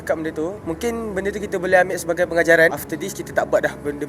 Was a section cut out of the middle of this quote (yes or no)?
yes